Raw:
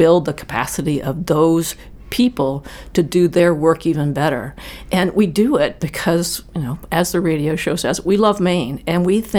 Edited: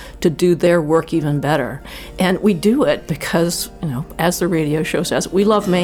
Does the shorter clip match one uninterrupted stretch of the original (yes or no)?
yes